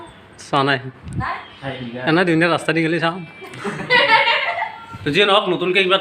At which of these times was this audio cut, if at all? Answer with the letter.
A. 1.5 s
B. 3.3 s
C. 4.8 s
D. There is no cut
C